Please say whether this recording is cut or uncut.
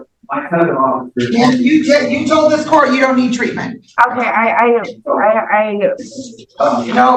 uncut